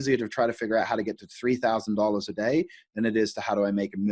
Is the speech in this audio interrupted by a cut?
no; 0 cuts

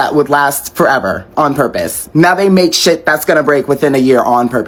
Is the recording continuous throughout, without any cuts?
yes; 0 cuts

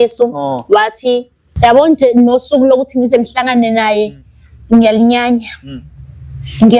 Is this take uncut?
no; 1 cut; at 1.4 s

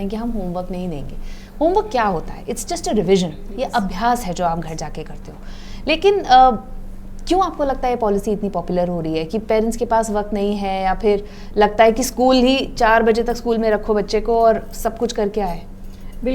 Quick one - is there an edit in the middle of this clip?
no; 0 cuts

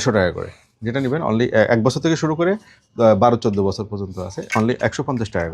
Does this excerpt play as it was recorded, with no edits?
yes; 0 cuts

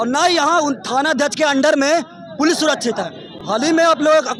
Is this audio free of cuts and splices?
yes; 0 cuts

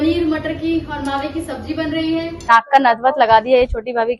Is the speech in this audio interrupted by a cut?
yes; 1 cut; at 2.3 s

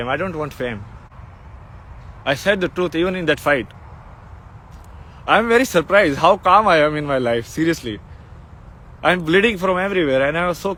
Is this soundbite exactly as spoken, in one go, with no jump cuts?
yes; 0 cuts

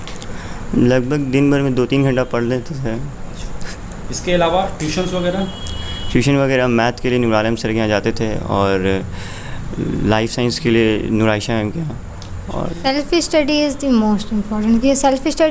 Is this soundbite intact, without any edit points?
no; 1 cut; at 12.7 s

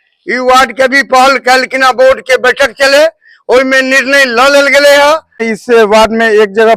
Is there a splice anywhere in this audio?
yes; 1 cut; at 5.5 s

